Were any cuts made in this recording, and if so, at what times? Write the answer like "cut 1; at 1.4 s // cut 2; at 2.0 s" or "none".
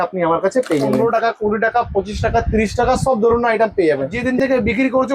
cut 1; at 1.0 s // cut 2; at 4.2 s